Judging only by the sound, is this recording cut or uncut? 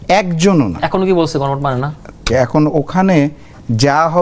cut